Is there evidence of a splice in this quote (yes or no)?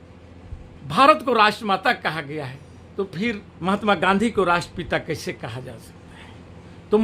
yes